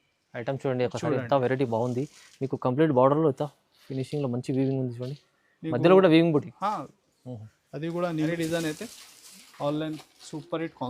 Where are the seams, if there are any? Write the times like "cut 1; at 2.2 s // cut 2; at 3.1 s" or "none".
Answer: cut 1; at 8.3 s